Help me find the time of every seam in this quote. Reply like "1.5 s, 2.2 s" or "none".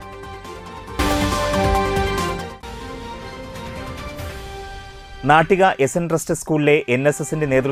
none